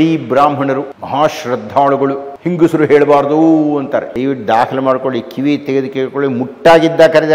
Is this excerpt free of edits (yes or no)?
no